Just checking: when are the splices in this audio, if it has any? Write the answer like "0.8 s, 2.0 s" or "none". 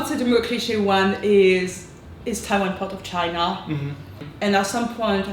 4.2 s